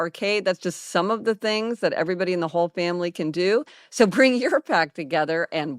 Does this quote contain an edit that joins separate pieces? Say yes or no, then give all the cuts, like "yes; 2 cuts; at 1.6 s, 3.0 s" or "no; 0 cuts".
yes; 1 cut; at 3.8 s